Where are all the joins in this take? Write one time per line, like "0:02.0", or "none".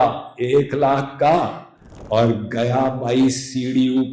none